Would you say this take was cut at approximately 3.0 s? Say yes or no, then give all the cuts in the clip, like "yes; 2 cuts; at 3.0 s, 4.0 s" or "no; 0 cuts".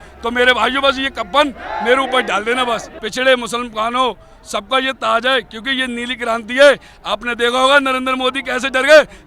yes; 1 cut; at 3.0 s